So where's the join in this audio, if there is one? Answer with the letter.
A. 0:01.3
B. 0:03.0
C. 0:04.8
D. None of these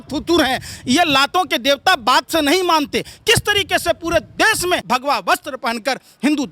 C